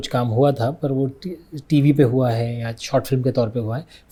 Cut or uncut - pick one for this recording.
uncut